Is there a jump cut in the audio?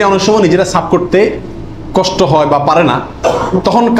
no; 0 cuts

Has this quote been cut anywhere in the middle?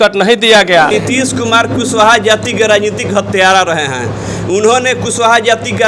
yes; 1 cut; at 0.9 s

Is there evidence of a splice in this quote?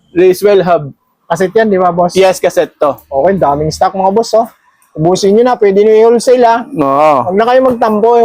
no; 0 cuts

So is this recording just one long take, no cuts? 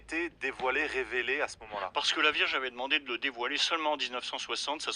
yes; 0 cuts

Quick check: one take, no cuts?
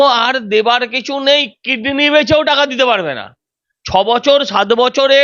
yes; 0 cuts

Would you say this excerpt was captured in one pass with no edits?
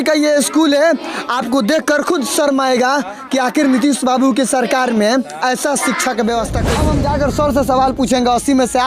no; 1 cut; at 6.7 s

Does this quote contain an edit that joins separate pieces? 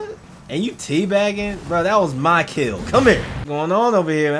yes; 1 cut; at 3.3 s

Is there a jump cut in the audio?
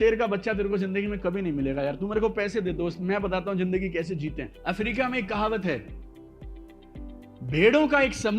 yes; 1 cut; at 4.5 s

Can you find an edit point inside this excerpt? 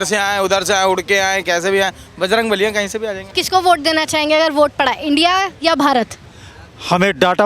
yes; 1 cut; at 3.3 s

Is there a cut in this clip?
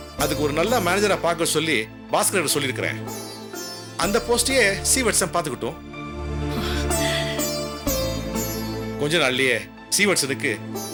no; 0 cuts

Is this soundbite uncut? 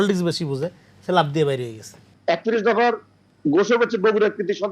no; 1 cut; at 2.1 s

